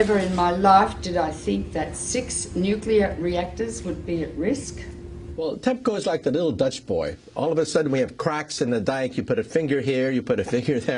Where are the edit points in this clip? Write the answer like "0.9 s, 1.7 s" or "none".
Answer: 2.0 s